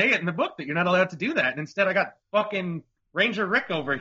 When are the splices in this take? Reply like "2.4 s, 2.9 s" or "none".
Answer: 2.6 s